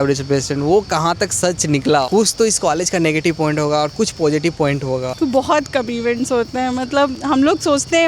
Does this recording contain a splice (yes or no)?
yes